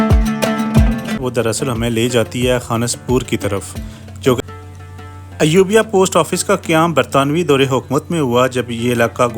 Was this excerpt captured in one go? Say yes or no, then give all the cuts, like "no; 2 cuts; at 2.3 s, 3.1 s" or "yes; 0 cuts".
no; 2 cuts; at 1.2 s, 4.4 s